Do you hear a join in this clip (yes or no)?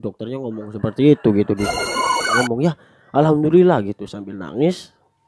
yes